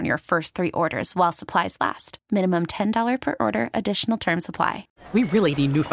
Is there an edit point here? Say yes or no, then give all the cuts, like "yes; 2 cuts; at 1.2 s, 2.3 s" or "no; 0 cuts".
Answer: yes; 1 cut; at 4.9 s